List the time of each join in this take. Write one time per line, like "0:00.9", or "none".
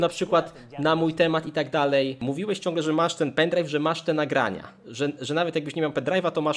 none

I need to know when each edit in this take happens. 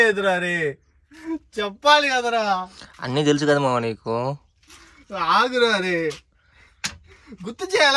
none

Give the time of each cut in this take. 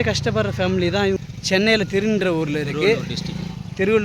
0:01.3

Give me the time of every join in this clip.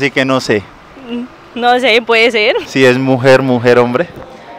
0:02.7

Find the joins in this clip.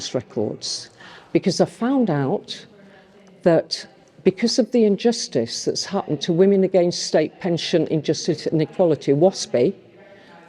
none

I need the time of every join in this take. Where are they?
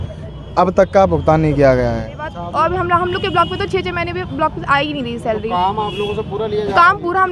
0:02.4

